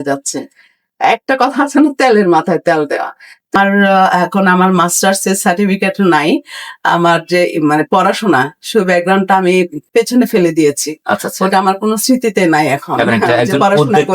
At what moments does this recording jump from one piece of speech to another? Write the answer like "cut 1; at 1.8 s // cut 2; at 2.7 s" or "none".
cut 1; at 3.6 s